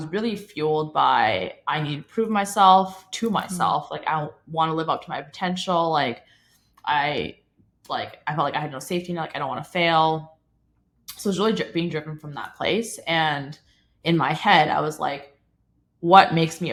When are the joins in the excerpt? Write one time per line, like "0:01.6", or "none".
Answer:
none